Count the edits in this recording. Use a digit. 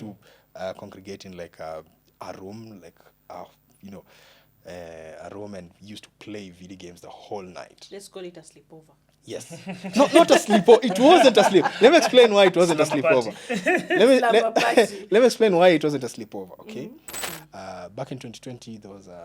1